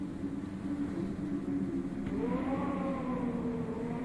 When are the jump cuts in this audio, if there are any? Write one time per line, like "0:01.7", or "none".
0:02.8